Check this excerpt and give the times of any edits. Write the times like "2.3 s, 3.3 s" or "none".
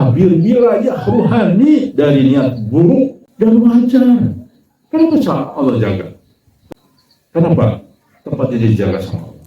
3.2 s, 6.6 s